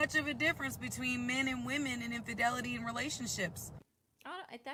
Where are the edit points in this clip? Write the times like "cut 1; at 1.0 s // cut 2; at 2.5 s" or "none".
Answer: none